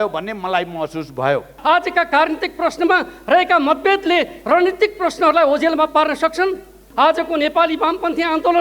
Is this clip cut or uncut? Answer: cut